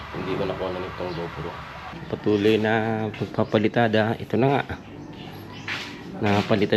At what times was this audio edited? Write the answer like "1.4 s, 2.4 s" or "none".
1.9 s